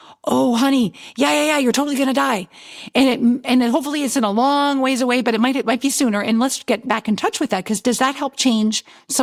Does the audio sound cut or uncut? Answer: uncut